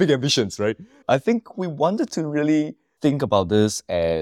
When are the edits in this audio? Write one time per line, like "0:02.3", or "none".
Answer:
0:01.0
0:02.8